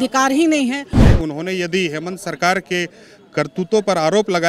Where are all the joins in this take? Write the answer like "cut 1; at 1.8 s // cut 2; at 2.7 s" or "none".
cut 1; at 1.0 s